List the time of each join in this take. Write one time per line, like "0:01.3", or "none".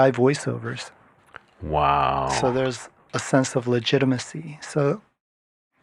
none